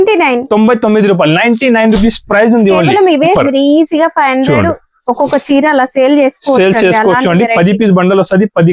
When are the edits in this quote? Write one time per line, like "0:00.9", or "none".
0:03.4